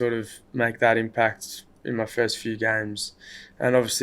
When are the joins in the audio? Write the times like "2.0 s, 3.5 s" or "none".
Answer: none